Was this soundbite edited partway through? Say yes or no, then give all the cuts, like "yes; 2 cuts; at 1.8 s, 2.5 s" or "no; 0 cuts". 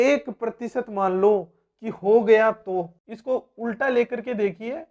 yes; 1 cut; at 3.1 s